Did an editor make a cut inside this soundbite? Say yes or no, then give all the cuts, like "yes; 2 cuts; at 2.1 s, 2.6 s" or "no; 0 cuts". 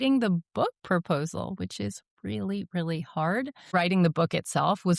yes; 1 cut; at 3.7 s